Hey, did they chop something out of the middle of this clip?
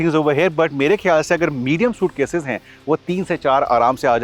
no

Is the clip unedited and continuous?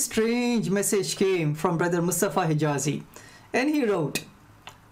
no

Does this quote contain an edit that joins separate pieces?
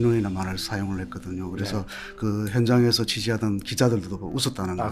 no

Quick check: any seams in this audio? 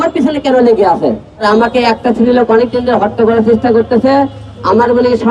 yes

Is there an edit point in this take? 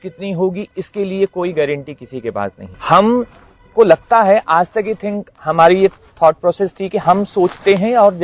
no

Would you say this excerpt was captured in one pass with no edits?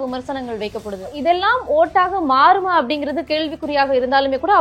no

